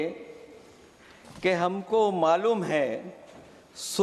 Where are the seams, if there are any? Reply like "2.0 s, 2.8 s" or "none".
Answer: none